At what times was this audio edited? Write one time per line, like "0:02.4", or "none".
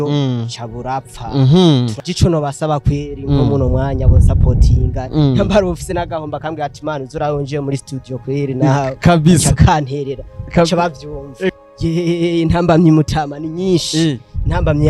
0:02.0
0:11.5